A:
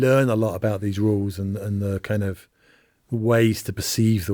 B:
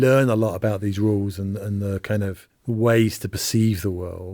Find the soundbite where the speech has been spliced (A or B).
B